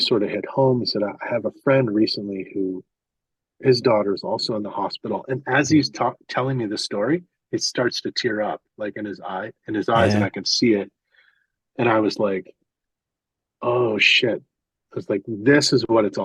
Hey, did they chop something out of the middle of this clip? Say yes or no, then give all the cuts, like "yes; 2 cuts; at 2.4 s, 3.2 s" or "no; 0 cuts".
no; 0 cuts